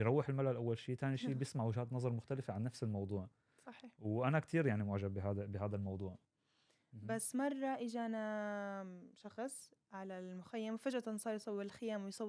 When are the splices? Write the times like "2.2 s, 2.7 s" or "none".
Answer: 6.2 s